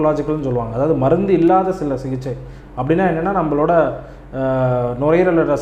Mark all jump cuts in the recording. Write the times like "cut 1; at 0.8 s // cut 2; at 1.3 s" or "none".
none